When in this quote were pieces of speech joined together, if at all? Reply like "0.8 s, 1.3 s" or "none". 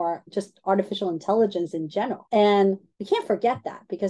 2.2 s, 2.9 s